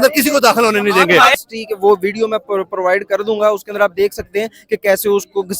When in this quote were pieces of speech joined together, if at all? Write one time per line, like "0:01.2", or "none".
0:01.4